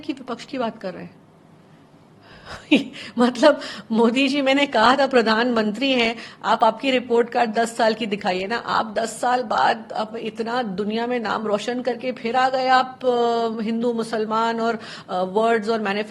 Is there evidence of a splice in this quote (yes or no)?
no